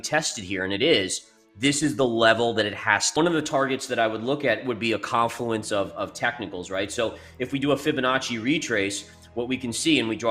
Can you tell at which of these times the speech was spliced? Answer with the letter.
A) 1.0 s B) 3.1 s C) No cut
B